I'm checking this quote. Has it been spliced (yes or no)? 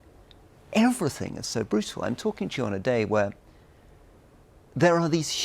no